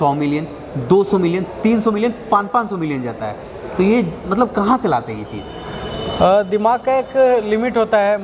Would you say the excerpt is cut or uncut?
uncut